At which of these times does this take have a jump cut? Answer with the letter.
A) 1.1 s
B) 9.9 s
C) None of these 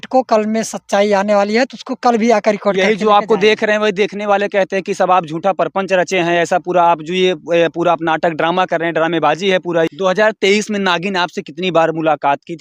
B